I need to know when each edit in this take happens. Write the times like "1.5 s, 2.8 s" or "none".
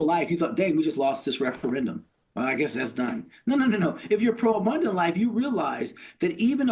none

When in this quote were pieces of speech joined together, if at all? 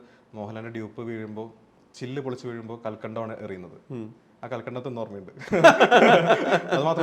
none

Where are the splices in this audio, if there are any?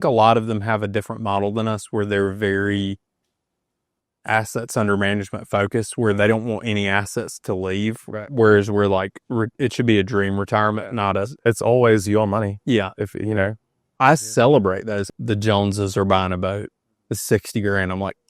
15.0 s

